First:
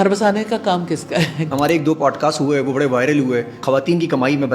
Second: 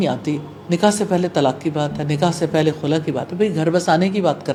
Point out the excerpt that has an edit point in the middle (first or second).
first